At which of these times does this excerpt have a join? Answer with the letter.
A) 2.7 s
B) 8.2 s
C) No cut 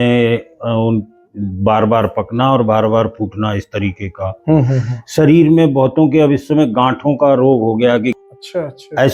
B